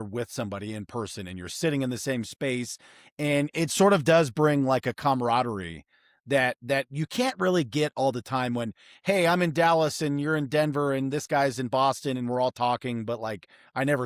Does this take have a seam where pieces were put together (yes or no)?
no